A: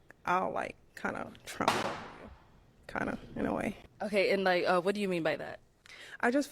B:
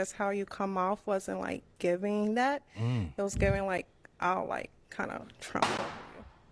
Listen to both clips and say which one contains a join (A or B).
A